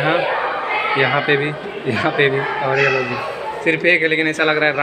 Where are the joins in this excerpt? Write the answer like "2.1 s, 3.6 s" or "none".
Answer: none